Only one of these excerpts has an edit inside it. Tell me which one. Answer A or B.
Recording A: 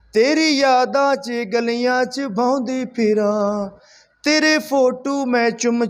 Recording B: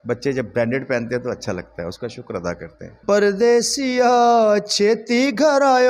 B